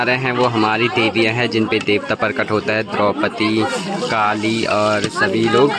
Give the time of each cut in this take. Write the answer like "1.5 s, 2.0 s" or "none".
none